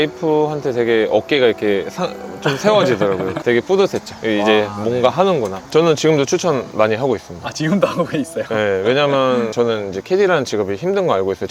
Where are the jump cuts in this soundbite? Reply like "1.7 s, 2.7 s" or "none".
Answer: 5.6 s